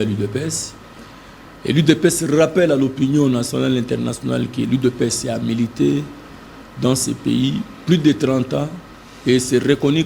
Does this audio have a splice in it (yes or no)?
no